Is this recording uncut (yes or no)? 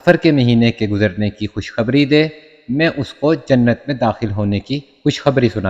yes